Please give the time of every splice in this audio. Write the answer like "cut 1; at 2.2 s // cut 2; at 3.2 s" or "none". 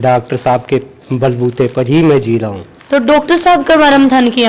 none